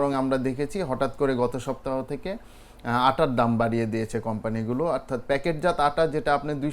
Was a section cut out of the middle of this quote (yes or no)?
no